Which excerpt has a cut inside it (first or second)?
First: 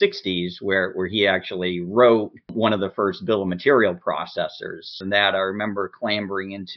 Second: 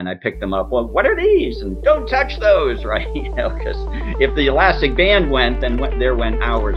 first